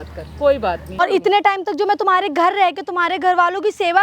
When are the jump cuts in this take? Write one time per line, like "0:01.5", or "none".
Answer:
0:01.0